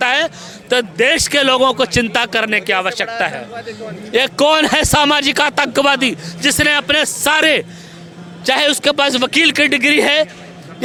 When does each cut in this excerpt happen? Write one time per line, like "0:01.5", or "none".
none